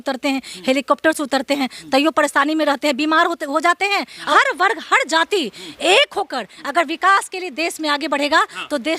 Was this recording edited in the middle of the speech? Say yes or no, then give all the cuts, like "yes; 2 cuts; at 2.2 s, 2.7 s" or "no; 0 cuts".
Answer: yes; 1 cut; at 4.3 s